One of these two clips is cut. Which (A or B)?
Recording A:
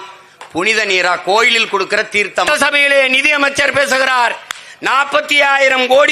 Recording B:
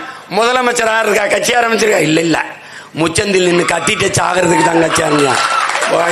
A